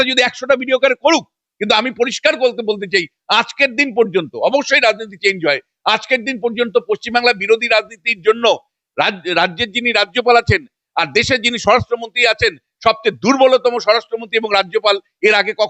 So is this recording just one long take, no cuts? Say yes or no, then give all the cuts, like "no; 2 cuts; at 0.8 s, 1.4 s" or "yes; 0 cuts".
yes; 0 cuts